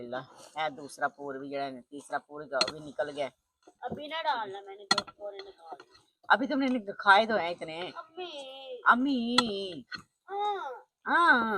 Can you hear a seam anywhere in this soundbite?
no; 0 cuts

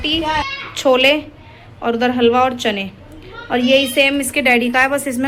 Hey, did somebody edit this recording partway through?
no; 0 cuts

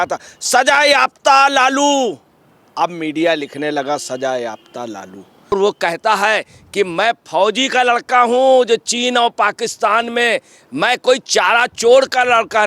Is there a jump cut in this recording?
yes; 1 cut; at 5.5 s

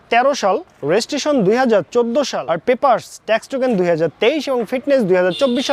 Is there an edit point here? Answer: yes; 1 cut; at 2.4 s

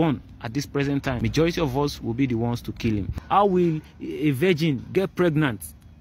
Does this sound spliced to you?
yes; 3 cuts; at 1.2 s, 3.1 s, 5.1 s

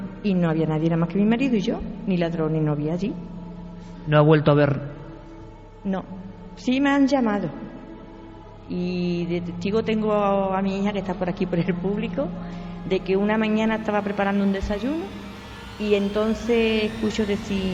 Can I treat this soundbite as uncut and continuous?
yes; 0 cuts

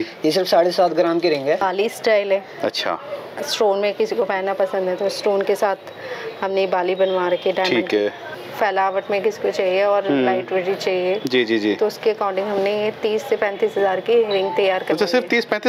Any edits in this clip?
yes; 2 cuts; at 1.6 s, 8.4 s

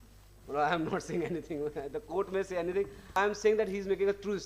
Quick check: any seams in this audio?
yes; 1 cut; at 3.2 s

